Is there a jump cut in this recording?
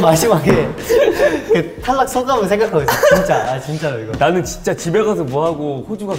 no; 0 cuts

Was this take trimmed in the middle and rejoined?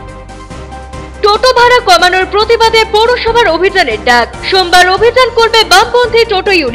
yes; 1 cut; at 1.0 s

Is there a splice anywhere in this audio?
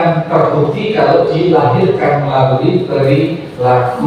no; 0 cuts

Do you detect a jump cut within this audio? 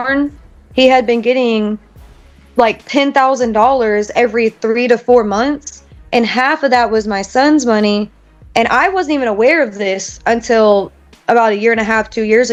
no; 0 cuts

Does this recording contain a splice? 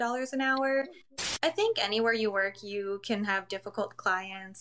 yes; 1 cut; at 1.1 s

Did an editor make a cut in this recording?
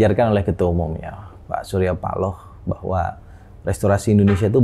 no; 0 cuts

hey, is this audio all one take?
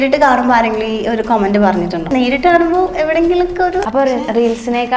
no; 2 cuts; at 2.1 s, 3.8 s

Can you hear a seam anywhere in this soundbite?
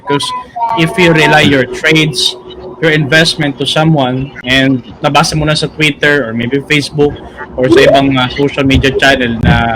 yes; 1 cut; at 4.9 s

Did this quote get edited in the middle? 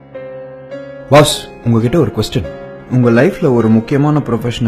yes; 1 cut; at 1.1 s

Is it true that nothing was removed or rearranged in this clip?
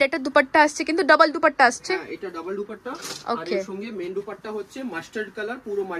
yes; 0 cuts

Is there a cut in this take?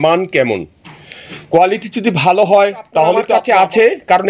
yes; 1 cut; at 3.3 s

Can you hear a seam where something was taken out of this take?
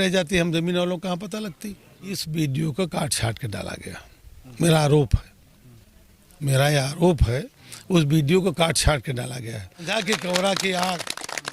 yes; 2 cuts; at 2.2 s, 9.9 s

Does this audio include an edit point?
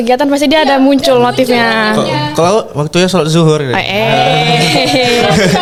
no; 0 cuts

